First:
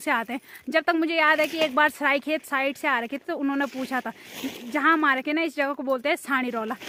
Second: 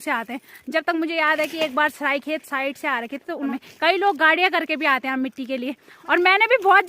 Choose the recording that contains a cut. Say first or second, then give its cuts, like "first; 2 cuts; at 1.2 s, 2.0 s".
second; 2 cuts; at 3.5 s, 5.9 s